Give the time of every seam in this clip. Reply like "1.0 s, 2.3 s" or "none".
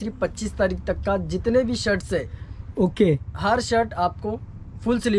none